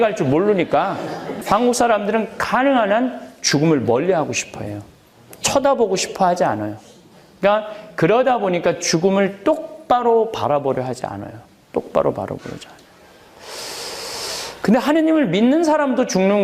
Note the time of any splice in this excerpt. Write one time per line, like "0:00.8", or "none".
0:01.3

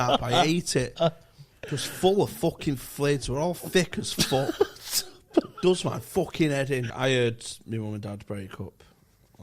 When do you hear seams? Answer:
0:06.9

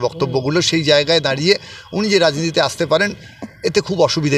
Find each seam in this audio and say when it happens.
none

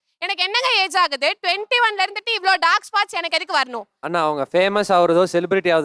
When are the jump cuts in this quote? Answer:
0:03.8

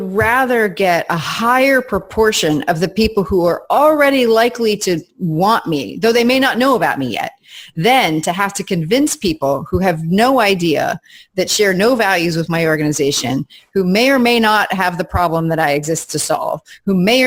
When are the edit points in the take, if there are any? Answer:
none

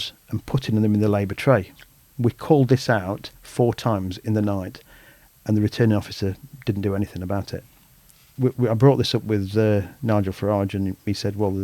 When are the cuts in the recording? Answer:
0:07.6

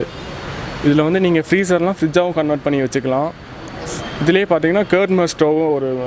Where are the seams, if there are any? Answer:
none

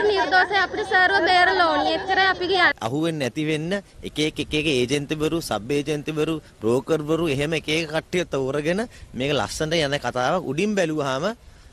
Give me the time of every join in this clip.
0:02.7

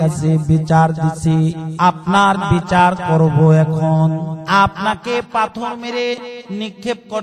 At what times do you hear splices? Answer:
0:01.6
0:04.3

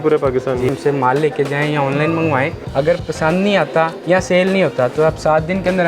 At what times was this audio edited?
0:00.7
0:02.6
0:04.0

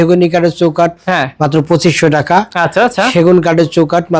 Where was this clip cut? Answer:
none

